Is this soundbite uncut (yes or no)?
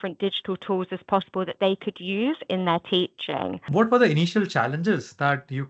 no